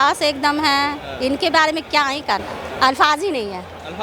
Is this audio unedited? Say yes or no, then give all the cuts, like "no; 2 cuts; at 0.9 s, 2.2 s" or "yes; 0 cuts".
no; 1 cut; at 2.6 s